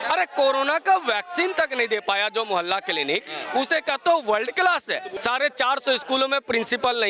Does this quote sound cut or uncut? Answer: cut